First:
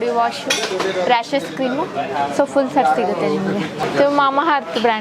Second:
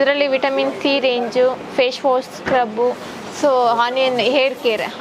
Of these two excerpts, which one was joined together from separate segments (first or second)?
first